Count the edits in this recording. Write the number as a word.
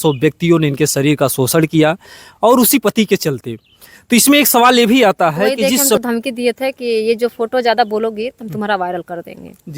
one